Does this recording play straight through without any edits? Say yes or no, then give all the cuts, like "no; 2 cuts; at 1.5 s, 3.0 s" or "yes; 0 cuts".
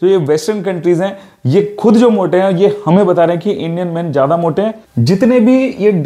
no; 1 cut; at 4.9 s